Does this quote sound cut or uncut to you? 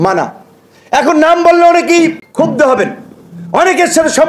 cut